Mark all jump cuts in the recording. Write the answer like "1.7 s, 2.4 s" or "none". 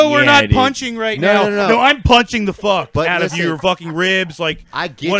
none